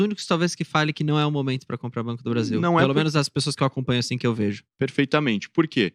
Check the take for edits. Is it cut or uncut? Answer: uncut